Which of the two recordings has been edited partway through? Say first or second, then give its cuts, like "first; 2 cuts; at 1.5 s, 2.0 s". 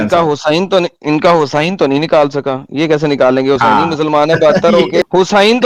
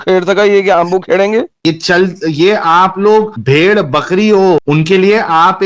second; 1 cut; at 1.5 s